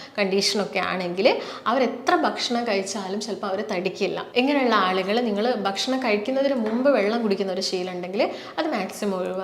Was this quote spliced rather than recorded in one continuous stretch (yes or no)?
yes